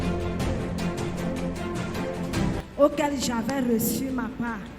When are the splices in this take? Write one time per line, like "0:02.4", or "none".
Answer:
0:02.6